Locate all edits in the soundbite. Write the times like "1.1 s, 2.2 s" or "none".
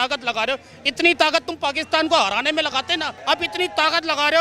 3.1 s